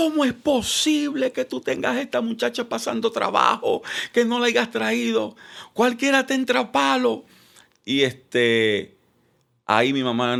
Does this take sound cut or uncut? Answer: uncut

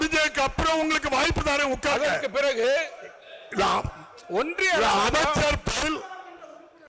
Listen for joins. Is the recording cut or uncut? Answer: uncut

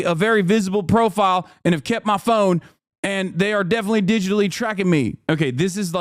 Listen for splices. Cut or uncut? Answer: uncut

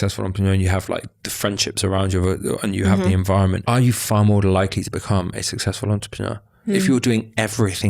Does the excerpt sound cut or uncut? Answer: cut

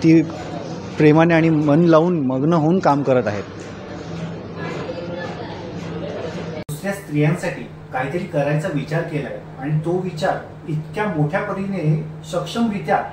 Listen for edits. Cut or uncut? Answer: cut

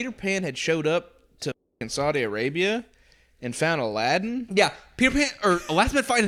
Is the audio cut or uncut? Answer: uncut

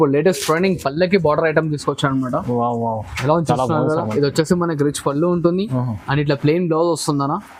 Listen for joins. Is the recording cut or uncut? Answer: uncut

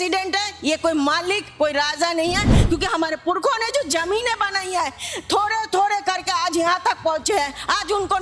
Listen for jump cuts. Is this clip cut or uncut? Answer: uncut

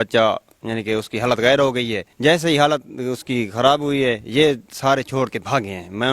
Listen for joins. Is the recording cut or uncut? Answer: cut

